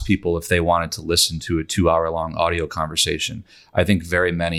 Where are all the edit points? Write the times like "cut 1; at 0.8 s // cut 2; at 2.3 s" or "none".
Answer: none